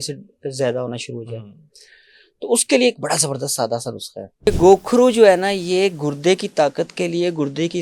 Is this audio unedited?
no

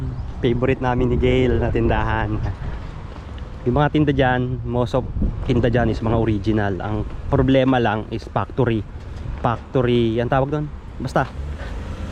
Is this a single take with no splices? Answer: yes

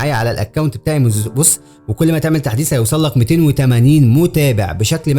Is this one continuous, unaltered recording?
no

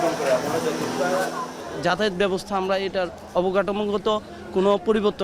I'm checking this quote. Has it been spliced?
yes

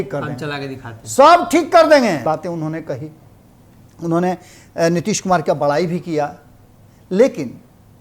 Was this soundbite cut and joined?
yes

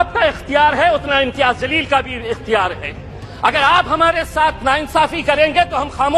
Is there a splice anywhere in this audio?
no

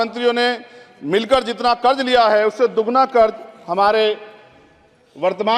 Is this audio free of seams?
yes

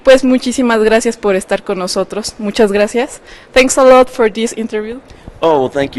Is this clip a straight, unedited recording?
no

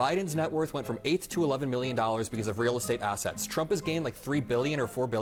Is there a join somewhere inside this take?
no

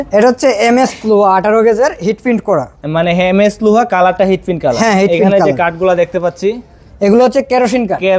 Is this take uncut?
yes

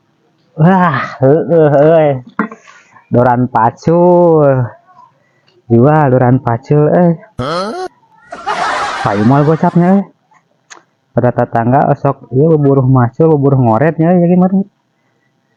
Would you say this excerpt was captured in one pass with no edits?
yes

